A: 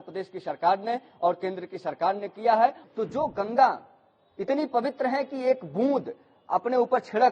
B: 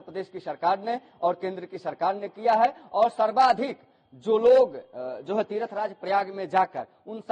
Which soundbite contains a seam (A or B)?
A